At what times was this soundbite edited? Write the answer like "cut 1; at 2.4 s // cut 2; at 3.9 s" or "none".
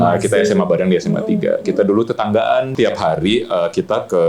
cut 1; at 2.7 s